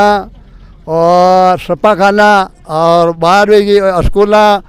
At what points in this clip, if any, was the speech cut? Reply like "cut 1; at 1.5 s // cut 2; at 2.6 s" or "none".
none

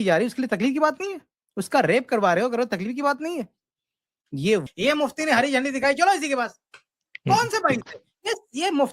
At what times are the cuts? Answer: cut 1; at 4.7 s

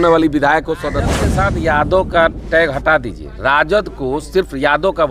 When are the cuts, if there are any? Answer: cut 1; at 1.3 s

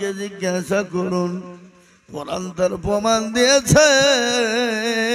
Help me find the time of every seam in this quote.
none

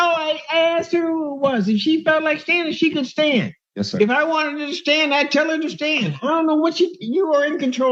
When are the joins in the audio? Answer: none

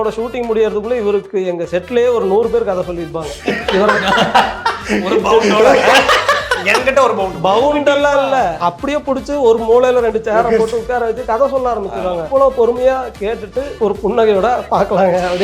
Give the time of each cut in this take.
cut 1; at 8.6 s // cut 2; at 12.2 s // cut 3; at 13.7 s

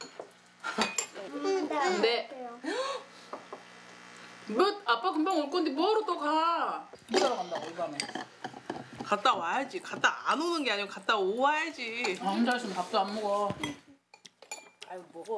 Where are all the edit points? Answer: cut 1; at 1.3 s // cut 2; at 12.1 s

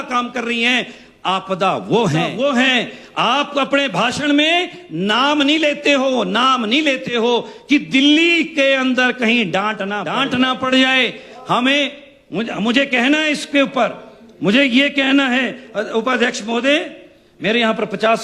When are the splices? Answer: cut 1; at 2.3 s // cut 2; at 10.1 s

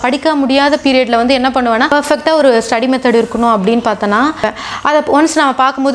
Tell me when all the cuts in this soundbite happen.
cut 1; at 1.9 s // cut 2; at 4.5 s

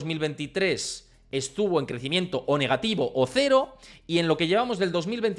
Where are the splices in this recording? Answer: none

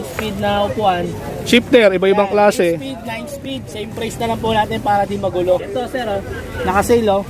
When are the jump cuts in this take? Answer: cut 1; at 1.2 s // cut 2; at 5.7 s

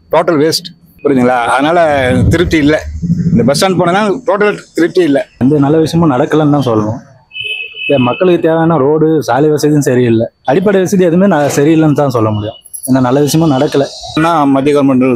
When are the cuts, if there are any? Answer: cut 1; at 5.3 s // cut 2; at 14.2 s

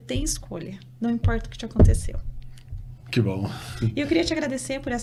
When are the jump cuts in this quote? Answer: none

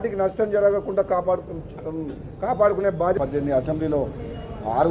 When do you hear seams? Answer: cut 1; at 3.2 s

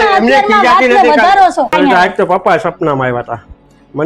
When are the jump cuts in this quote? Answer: cut 1; at 1.7 s

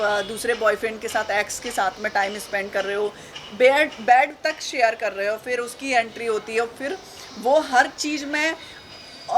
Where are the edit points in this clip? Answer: none

